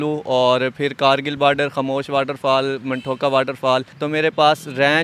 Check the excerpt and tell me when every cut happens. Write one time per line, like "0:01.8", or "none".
0:03.9